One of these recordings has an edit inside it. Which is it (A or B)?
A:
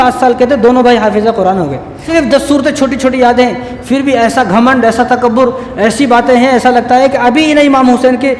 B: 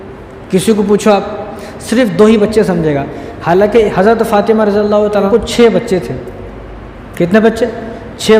A